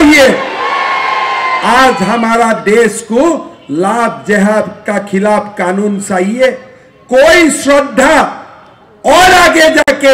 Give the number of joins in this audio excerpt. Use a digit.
0